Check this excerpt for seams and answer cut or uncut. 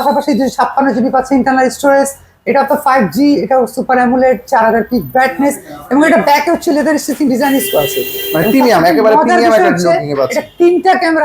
uncut